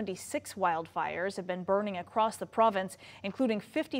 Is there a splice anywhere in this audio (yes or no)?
no